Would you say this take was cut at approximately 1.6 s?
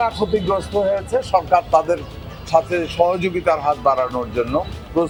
no; 0 cuts

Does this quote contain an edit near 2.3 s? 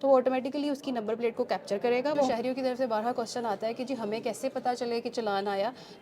yes; 1 cut; at 2.3 s

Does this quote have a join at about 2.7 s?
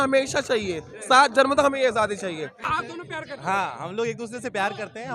yes; 1 cut; at 2.7 s

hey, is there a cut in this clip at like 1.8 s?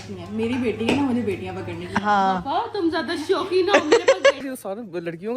no; 1 cut; at 4.4 s

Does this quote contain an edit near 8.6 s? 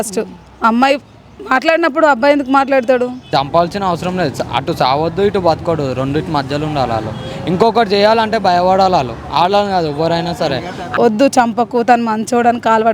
no; 2 cuts; at 3.3 s, 10.8 s

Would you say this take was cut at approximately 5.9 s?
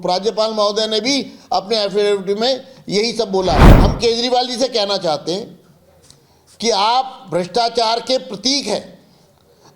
no; 1 cut; at 3.7 s

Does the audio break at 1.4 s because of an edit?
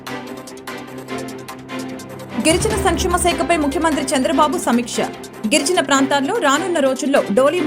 yes; 1 cut; at 1.4 s

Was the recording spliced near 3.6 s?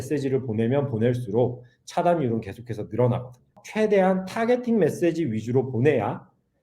yes; 1 cut; at 3.6 s

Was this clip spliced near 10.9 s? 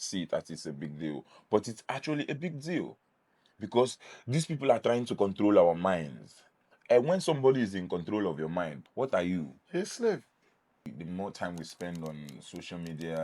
yes; 3 cuts; at 8.8 s, 9.6 s, 10.9 s

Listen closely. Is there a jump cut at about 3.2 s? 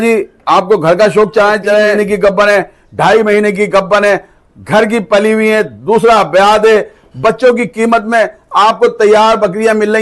no; 1 cut; at 1.9 s

